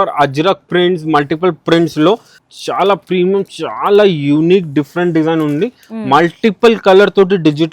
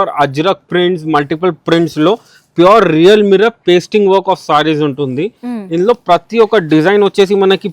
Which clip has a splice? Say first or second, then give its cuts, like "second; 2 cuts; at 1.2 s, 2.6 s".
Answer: first; 1 cut; at 2.4 s